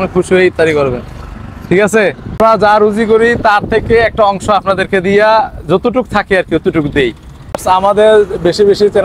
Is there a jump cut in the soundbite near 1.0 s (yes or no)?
no